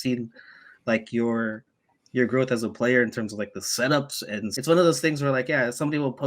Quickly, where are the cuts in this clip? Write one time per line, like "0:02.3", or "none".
0:04.5